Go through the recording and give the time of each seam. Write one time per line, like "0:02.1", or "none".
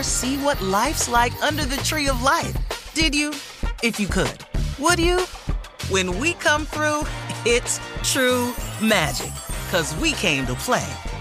none